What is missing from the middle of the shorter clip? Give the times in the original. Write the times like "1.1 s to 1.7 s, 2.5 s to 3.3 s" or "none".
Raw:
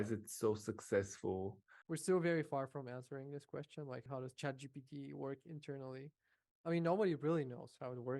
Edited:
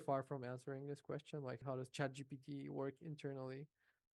none